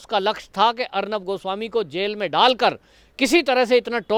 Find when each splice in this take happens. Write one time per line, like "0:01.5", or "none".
none

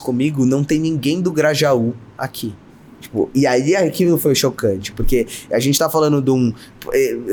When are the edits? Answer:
none

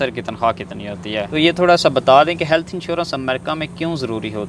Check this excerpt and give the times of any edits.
0:01.3

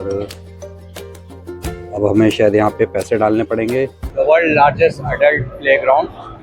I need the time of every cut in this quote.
0:04.0

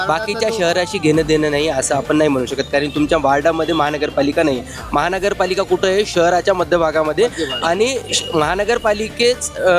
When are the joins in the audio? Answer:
none

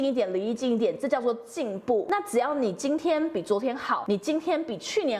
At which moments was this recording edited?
0:02.0
0:04.0

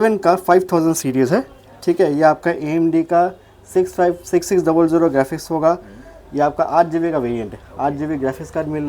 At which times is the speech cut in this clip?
none

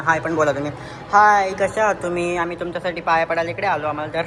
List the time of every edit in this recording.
none

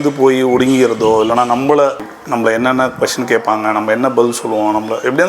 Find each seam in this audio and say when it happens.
0:02.1

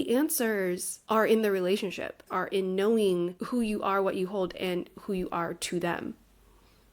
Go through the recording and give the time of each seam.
0:00.9
0:02.3
0:03.4

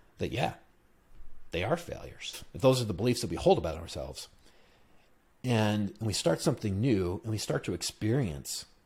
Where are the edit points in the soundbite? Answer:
0:02.4

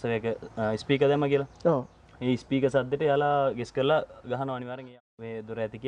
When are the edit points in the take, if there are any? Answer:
0:04.9

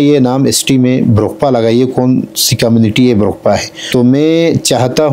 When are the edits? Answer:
0:03.7

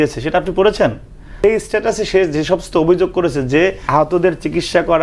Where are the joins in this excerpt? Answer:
0:01.4
0:03.8

